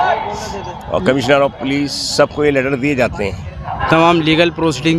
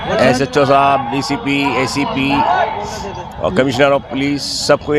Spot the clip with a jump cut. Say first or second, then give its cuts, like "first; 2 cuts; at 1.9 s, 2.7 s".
first; 1 cut; at 3.7 s